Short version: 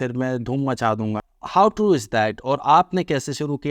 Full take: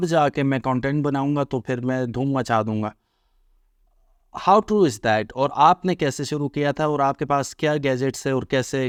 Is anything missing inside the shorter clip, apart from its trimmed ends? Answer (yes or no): yes